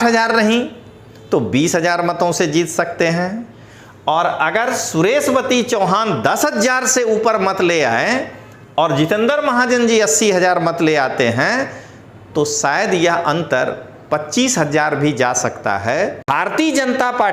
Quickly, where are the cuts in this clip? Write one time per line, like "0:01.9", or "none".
0:16.2

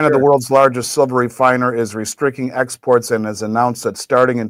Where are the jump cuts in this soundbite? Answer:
none

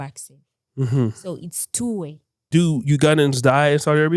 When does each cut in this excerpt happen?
0:02.3

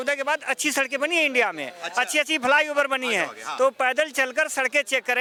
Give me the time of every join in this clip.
none

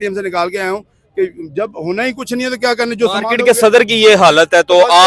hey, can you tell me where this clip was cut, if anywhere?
none

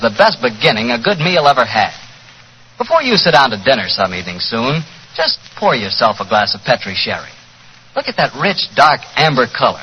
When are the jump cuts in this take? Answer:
0:01.0

